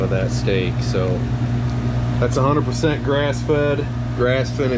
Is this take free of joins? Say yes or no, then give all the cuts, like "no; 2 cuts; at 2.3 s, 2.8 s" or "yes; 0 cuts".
yes; 0 cuts